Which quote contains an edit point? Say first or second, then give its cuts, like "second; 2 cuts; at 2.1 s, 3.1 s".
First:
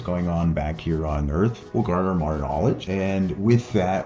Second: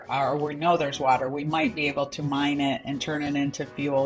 first; 2 cuts; at 1.6 s, 2.8 s